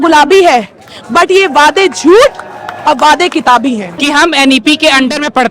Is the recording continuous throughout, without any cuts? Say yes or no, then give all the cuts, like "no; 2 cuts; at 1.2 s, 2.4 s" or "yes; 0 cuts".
no; 1 cut; at 3.9 s